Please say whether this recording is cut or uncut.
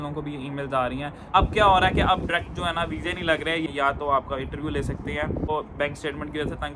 cut